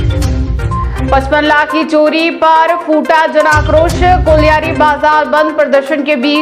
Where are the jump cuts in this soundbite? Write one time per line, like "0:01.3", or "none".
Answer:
0:01.0

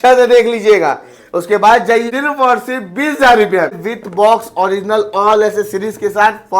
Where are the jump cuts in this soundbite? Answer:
0:02.0
0:03.9

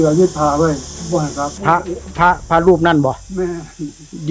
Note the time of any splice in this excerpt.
0:01.5

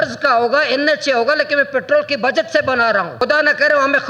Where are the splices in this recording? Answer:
0:03.2

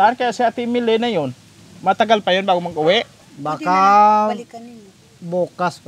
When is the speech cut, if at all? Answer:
0:03.2

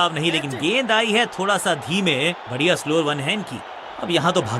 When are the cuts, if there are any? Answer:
0:03.7

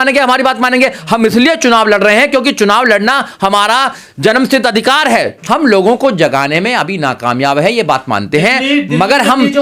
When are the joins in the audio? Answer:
0:05.4

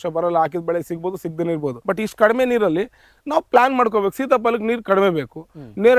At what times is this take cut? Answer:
0:01.8

